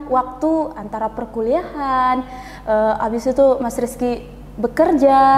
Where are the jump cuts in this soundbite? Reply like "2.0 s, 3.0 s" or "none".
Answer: none